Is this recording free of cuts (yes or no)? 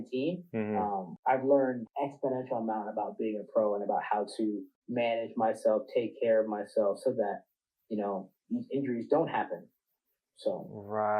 no